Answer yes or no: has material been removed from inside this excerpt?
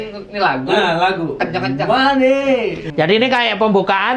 yes